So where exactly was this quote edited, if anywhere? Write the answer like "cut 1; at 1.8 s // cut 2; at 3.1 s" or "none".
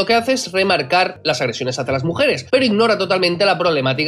cut 1; at 1.2 s